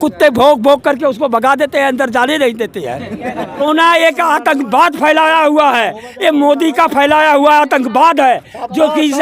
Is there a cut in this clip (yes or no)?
yes